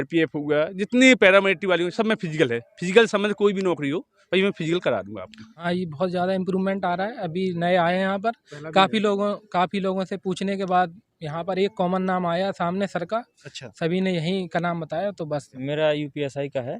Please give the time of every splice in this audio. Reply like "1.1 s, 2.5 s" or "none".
5.5 s, 15.5 s